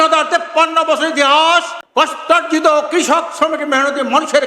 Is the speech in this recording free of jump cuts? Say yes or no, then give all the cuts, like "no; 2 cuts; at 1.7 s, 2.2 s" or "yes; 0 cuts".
no; 1 cut; at 1.8 s